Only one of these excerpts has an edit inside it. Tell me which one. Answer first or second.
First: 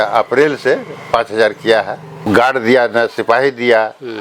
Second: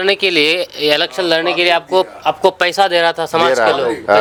first